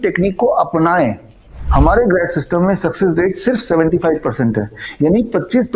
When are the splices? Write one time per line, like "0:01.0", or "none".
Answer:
0:01.5